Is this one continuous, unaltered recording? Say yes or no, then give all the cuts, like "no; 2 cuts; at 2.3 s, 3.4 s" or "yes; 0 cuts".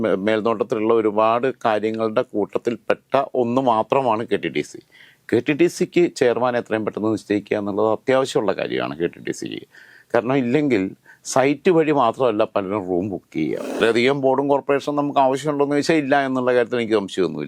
no; 1 cut; at 13.7 s